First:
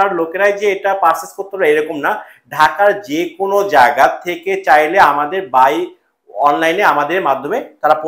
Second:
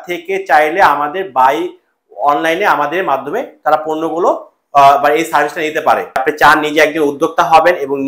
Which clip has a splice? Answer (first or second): second